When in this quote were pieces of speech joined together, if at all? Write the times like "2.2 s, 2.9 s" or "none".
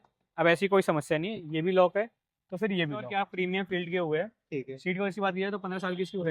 3.1 s